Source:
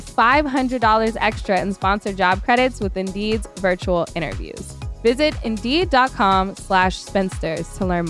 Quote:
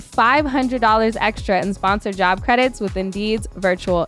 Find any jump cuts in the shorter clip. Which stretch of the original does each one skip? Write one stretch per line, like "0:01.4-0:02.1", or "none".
none